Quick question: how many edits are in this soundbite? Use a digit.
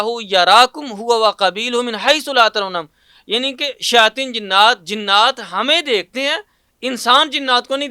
0